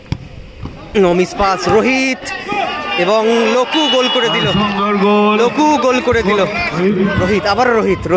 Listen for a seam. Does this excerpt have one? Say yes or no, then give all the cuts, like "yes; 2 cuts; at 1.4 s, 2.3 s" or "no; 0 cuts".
yes; 1 cut; at 6.8 s